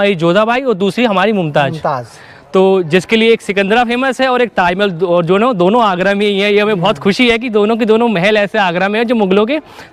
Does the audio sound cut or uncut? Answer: uncut